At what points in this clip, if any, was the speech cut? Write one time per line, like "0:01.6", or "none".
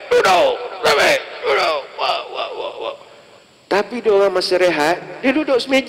none